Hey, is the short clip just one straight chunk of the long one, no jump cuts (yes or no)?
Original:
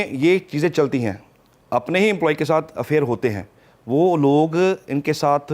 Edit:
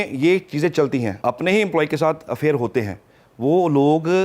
no